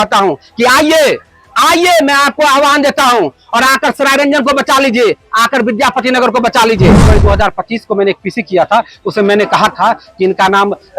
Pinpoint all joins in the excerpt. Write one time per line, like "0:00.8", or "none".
0:07.1